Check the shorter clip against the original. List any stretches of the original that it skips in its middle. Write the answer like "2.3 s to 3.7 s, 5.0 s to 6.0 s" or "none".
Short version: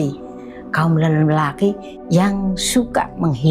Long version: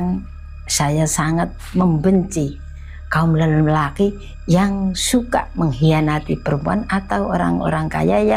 none